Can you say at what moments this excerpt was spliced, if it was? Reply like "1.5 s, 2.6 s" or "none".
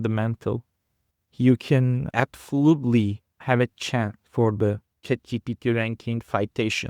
2.0 s, 3.3 s, 5.0 s